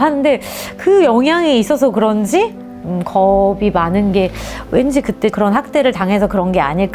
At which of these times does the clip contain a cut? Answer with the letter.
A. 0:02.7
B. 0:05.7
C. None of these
A